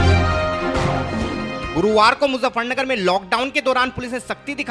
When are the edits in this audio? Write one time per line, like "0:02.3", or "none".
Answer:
0:01.2